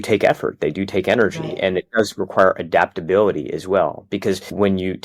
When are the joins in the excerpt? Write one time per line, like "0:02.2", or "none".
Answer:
none

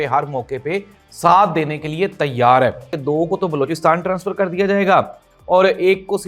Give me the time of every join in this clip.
0:02.9

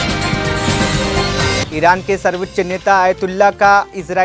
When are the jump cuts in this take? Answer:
0:01.6

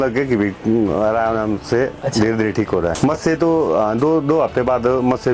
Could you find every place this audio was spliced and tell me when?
none

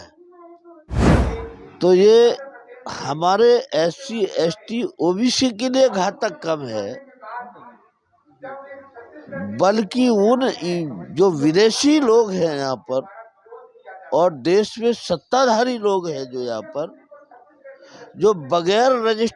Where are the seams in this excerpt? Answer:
0:01.2

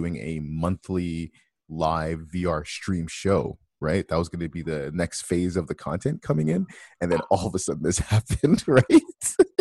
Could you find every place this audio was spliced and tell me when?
none

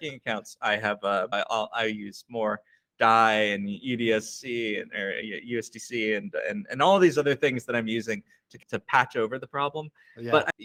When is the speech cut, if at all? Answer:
none

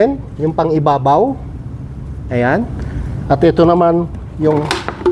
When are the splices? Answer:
none

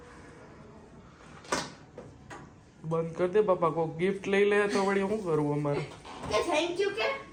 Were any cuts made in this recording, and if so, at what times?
none

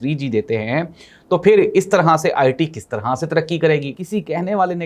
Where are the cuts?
0:04.0

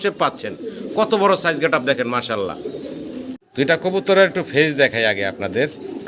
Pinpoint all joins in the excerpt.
0:03.4

